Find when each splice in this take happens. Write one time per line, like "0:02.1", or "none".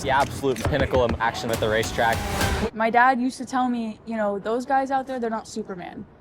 0:02.6